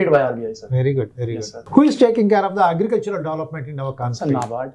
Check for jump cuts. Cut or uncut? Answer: cut